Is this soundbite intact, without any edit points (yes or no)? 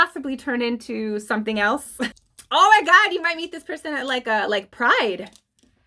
no